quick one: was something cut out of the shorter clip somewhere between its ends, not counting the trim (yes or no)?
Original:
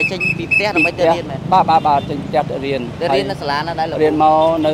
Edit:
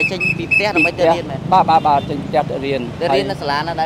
no